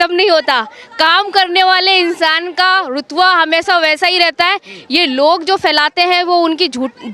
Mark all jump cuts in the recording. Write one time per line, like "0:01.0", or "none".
none